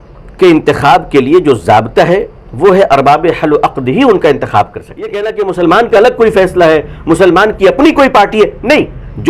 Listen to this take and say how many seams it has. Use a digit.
1